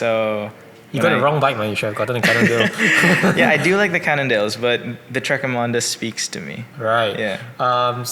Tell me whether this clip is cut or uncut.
uncut